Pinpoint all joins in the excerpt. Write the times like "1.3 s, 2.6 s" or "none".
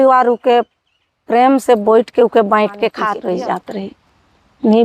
3.1 s